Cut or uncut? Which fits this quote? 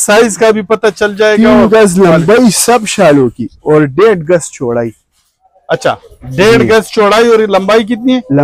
uncut